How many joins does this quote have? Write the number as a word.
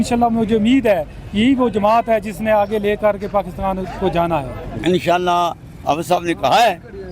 one